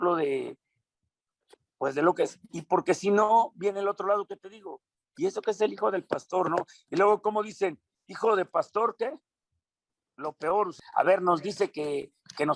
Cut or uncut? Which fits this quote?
cut